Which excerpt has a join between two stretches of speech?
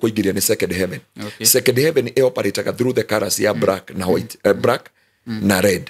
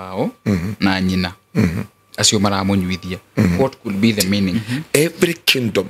second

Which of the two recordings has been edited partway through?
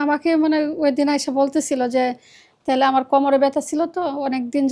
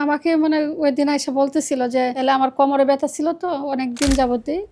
second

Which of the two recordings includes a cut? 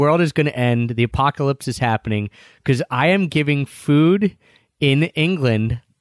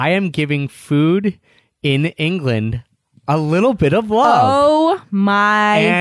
first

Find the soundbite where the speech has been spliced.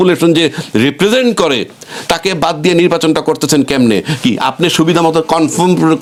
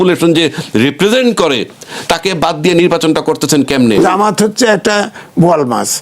second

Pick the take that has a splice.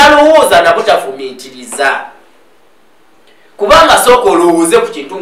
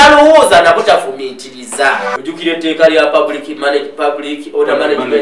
second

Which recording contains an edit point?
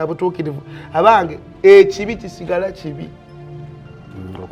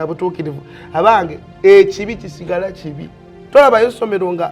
second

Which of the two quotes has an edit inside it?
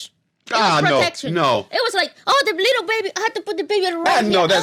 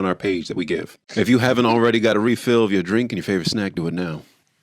second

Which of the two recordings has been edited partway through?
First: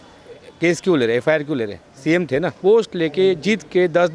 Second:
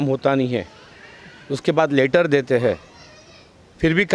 first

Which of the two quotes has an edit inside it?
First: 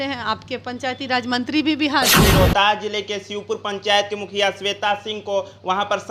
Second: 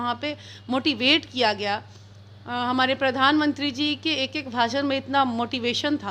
first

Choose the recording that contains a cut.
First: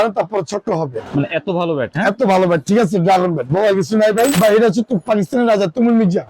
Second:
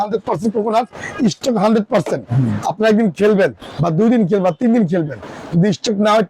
first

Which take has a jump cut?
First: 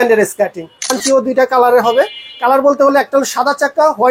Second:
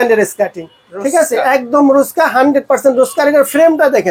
first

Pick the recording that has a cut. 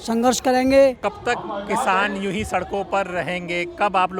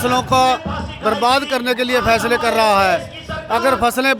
first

